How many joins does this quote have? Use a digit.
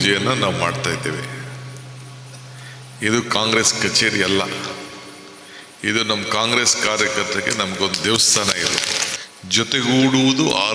1